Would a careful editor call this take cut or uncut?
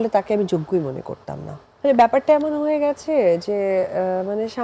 cut